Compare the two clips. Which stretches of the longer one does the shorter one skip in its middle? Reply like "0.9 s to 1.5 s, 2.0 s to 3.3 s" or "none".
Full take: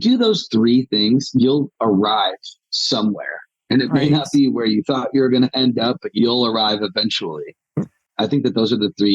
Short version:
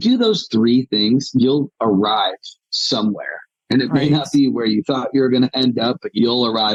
none